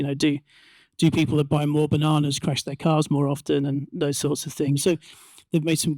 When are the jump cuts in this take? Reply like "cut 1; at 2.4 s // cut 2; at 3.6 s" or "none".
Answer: cut 1; at 4.8 s